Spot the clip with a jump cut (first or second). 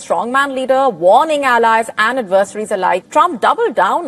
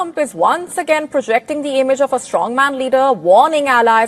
first